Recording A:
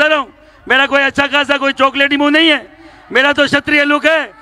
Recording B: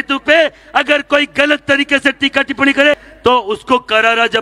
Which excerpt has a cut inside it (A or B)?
B